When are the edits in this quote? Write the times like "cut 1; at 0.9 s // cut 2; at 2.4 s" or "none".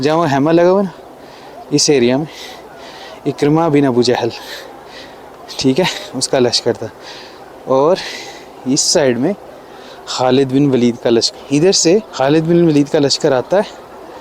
cut 1; at 11.3 s // cut 2; at 12.1 s

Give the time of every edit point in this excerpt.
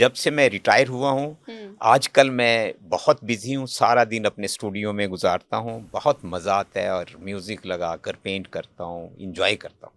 none

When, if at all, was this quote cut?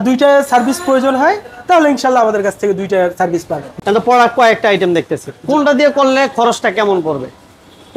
cut 1; at 3.6 s

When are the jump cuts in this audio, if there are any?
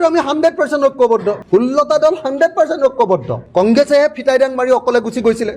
cut 1; at 1.4 s // cut 2; at 3.4 s

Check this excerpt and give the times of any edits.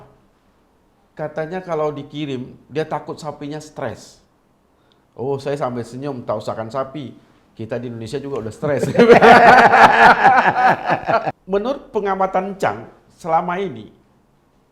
cut 1; at 11.3 s

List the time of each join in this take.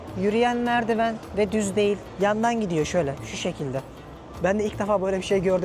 cut 1; at 2.1 s

